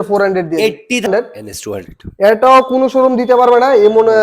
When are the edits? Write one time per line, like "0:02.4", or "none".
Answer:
0:01.1